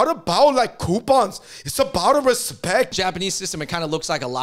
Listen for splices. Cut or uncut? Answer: cut